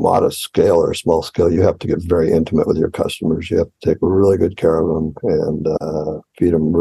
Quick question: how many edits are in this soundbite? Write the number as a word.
zero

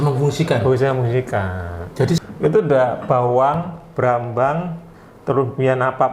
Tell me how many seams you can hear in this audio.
one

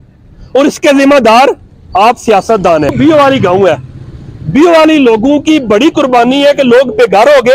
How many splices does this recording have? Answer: one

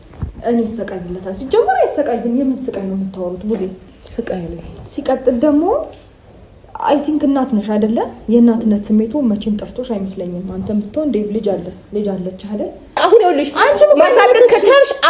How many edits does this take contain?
one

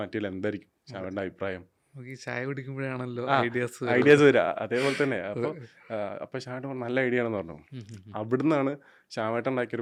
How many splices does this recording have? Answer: zero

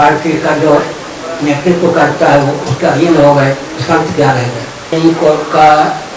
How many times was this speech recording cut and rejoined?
one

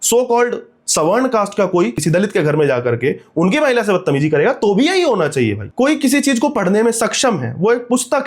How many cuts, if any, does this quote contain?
two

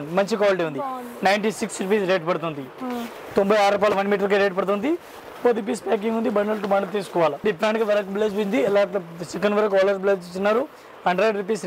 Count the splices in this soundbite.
zero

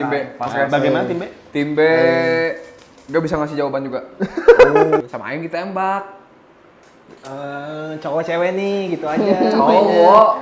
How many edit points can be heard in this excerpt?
one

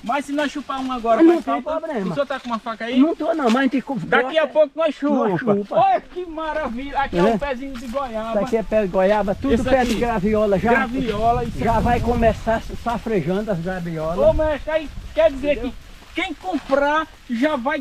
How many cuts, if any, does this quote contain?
zero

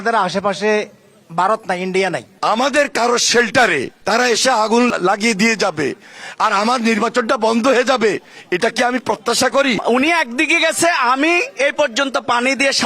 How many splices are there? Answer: four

